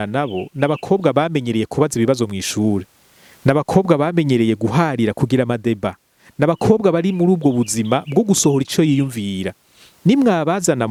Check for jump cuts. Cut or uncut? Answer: uncut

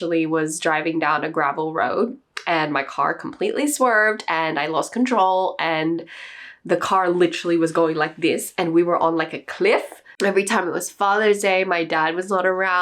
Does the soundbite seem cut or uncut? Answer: cut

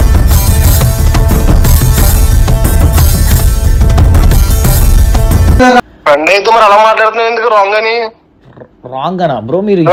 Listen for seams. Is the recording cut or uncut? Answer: uncut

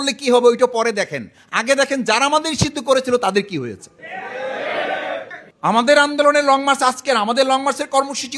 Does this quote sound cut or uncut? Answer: cut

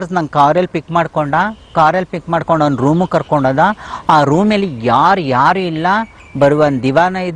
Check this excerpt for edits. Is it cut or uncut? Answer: uncut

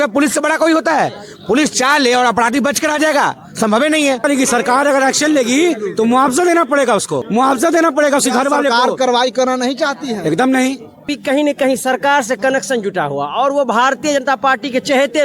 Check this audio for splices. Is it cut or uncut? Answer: cut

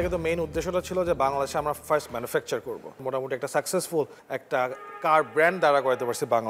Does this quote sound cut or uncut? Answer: cut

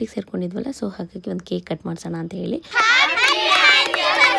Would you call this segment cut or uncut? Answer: cut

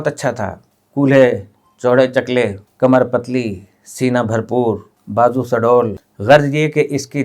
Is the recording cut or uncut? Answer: cut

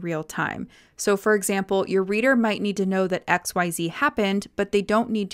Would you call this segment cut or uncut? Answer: uncut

